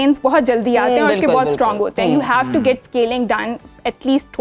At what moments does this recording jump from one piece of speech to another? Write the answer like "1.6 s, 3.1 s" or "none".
none